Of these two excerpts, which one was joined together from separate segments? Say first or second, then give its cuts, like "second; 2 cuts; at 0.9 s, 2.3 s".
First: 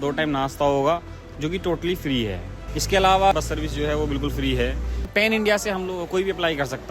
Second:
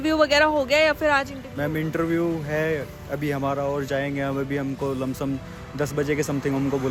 first; 3 cuts; at 2.5 s, 3.3 s, 5.1 s